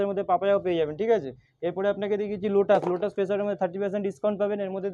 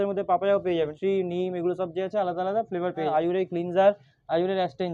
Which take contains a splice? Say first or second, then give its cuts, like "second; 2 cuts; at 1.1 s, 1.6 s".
second; 2 cuts; at 0.9 s, 3.1 s